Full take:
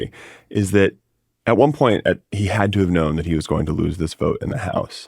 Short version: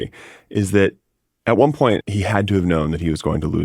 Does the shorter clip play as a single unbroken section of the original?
no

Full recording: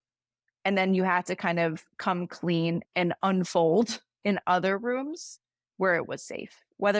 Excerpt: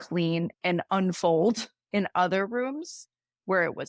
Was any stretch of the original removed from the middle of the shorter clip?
no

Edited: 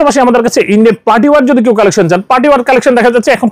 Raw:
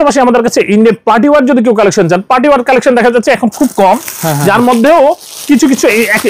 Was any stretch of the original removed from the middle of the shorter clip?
no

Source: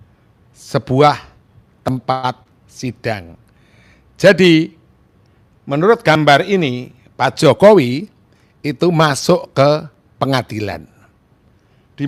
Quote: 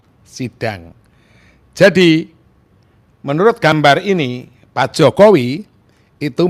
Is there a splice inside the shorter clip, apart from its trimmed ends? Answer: no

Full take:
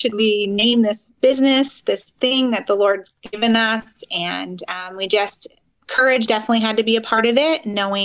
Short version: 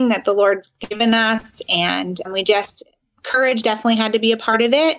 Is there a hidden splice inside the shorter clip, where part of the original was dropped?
yes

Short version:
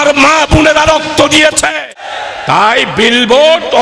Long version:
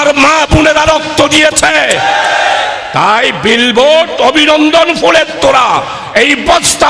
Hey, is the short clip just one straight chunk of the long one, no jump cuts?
no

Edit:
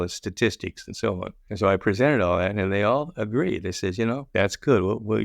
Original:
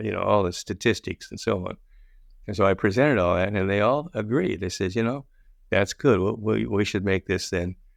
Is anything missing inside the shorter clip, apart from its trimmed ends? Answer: yes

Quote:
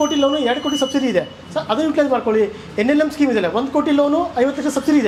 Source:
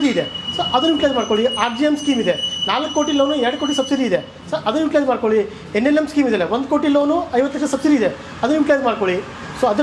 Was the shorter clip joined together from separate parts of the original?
no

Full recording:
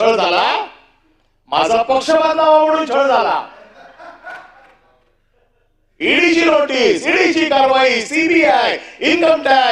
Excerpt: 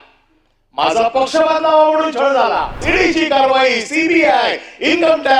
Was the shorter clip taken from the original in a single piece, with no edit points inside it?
no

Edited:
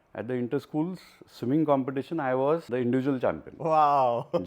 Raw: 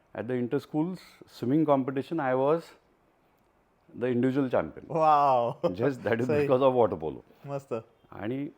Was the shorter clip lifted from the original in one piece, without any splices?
no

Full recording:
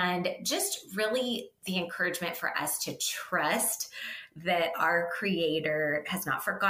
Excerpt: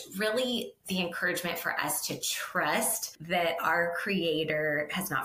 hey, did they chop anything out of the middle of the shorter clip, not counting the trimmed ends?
yes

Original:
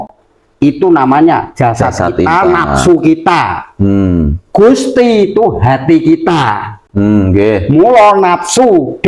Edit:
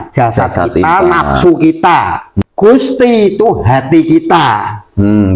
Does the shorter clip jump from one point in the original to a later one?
yes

